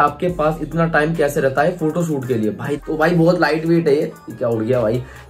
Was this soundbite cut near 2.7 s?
yes; 1 cut; at 2.7 s

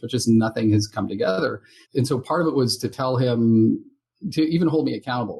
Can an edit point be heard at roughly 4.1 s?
no; 1 cut; at 1.7 s

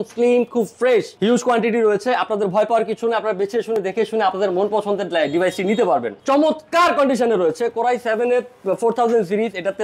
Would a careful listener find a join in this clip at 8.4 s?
no; 2 cuts; at 1.1 s, 6.1 s

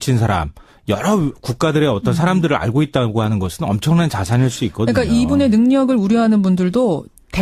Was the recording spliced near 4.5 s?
yes; 1 cut; at 4.5 s

